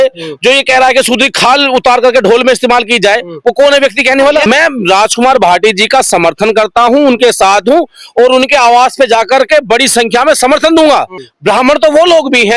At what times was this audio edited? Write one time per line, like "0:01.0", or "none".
0:04.5
0:11.2